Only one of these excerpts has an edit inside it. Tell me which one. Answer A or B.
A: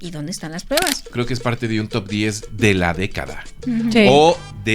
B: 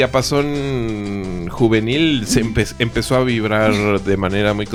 A